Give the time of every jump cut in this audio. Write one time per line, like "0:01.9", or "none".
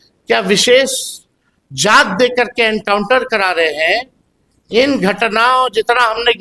none